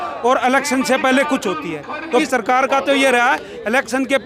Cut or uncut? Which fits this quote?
cut